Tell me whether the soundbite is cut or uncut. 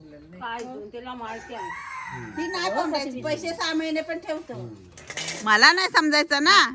cut